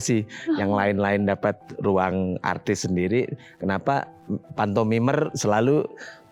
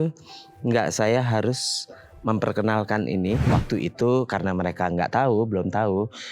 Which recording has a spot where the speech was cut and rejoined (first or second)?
second